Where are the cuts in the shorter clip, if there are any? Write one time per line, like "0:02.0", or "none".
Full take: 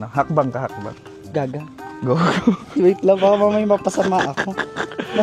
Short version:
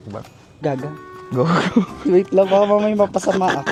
none